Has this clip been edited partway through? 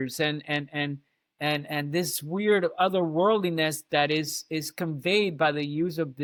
no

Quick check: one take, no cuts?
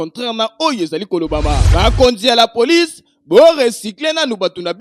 no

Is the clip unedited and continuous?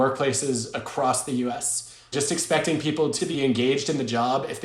no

